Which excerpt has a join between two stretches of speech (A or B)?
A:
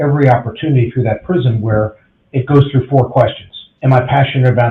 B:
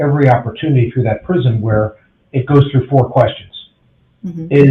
A